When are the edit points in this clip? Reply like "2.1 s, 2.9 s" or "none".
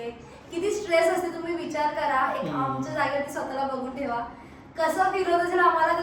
none

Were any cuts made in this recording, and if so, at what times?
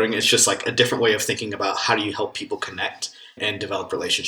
3.4 s

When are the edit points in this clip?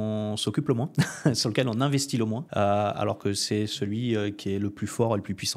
2.4 s

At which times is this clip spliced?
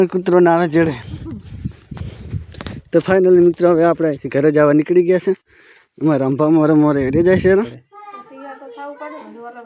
7.7 s

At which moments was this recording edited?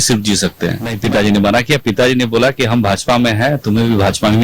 1.0 s

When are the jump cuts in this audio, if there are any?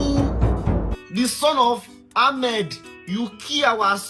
1.0 s, 2.8 s

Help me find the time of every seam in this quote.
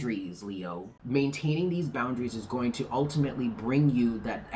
0.9 s

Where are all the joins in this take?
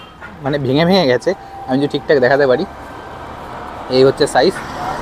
none

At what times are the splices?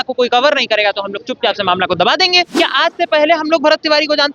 2.5 s

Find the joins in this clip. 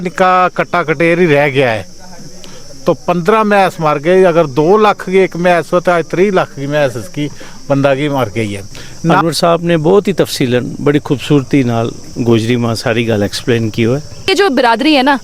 9.2 s, 14.3 s

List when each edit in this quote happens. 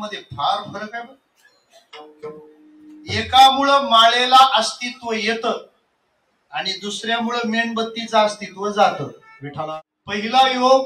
9.9 s

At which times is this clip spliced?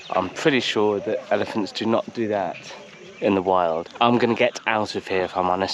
3.9 s

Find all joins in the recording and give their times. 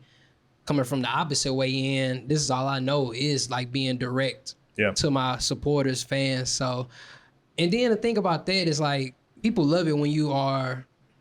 9.2 s

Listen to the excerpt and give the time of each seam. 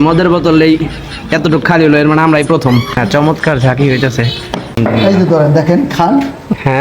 2.9 s, 4.8 s

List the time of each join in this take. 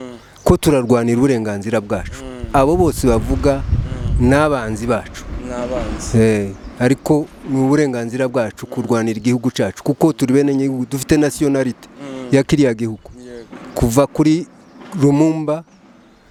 none

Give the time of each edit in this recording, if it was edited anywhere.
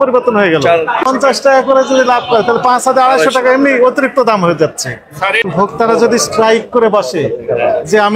1.0 s, 5.5 s

